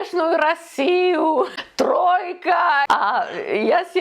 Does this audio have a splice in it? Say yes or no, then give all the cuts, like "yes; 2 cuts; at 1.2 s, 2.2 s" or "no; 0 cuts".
yes; 2 cuts; at 1.6 s, 2.9 s